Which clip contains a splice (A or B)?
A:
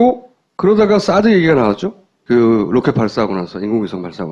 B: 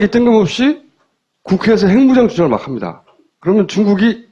B